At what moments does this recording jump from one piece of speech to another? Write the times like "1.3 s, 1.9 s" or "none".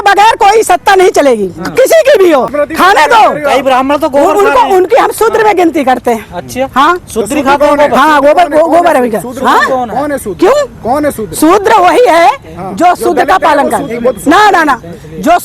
2.6 s